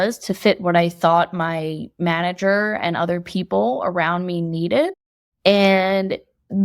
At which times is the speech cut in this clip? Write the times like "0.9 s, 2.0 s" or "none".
none